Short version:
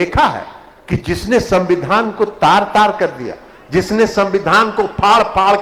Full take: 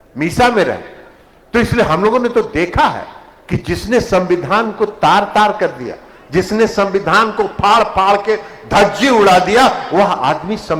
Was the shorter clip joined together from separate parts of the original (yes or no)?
no